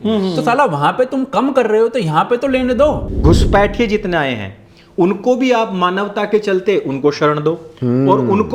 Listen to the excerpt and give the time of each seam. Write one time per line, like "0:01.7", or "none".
0:03.1